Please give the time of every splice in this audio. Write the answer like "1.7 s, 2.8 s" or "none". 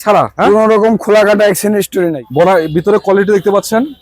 2.2 s

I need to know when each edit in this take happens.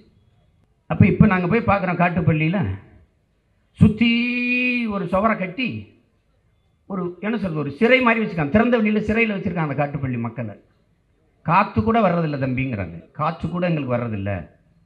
none

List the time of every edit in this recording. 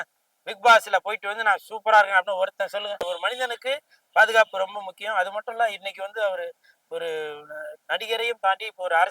3.0 s

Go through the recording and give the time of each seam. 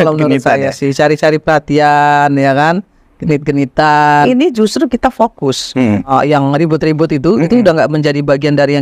4.3 s, 6.1 s

